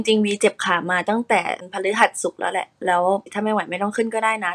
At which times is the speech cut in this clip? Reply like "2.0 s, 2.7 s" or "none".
1.6 s, 3.3 s